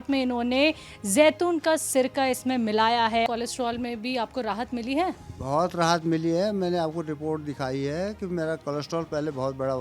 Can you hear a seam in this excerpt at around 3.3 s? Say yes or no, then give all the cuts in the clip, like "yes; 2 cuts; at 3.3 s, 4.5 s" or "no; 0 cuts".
yes; 1 cut; at 3.3 s